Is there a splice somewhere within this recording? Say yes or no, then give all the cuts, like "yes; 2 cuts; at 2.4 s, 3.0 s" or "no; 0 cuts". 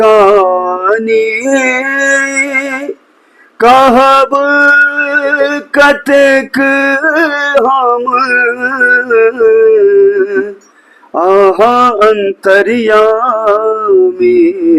no; 0 cuts